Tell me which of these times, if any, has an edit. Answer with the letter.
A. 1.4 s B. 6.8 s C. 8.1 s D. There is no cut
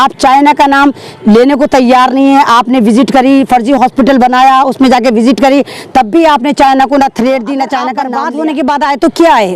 C